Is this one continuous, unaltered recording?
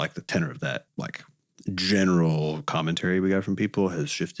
yes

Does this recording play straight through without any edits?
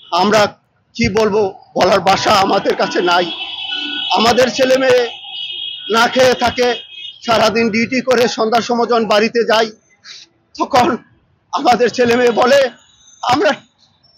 yes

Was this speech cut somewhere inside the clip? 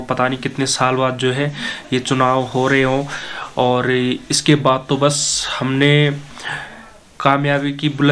no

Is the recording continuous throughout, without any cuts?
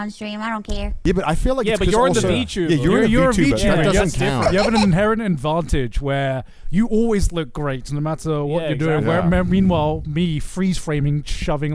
no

